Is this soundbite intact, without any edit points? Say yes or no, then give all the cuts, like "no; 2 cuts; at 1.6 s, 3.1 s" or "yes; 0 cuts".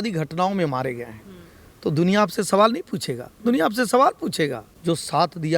no; 1 cut; at 4.7 s